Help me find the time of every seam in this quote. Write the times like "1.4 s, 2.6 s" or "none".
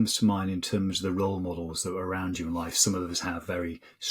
none